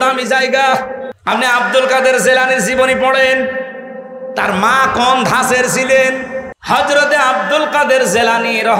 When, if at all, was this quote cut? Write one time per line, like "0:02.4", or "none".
0:01.1
0:06.5